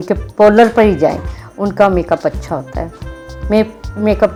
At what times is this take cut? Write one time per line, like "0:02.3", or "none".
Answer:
none